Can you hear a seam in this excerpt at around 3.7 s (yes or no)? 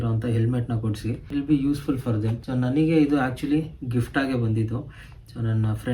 no